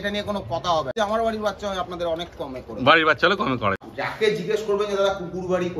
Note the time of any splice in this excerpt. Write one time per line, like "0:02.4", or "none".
0:00.9
0:03.8